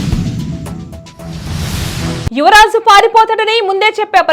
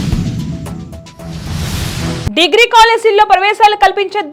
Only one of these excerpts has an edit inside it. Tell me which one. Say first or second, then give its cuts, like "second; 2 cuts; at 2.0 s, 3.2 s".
first; 1 cut; at 2.3 s